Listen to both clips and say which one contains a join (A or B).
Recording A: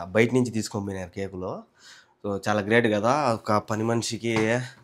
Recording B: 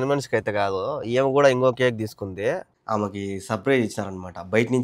B